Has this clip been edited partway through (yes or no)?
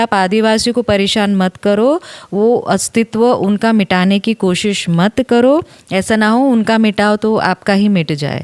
no